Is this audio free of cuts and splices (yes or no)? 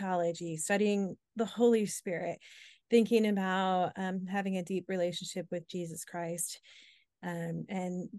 yes